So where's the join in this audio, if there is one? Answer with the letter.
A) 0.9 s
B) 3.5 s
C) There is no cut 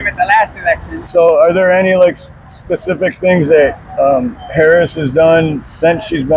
A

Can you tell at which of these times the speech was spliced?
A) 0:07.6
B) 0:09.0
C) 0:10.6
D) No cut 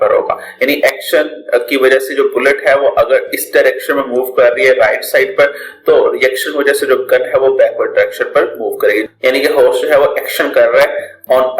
B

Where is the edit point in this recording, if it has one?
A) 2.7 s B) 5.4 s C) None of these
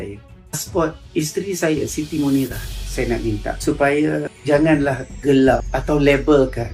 A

